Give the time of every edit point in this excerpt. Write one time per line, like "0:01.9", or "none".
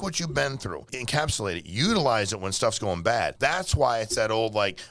0:00.9
0:03.3